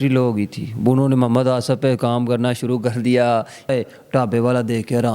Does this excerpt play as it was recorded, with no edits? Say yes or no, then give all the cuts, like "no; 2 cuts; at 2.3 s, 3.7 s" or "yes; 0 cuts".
no; 1 cut; at 3.7 s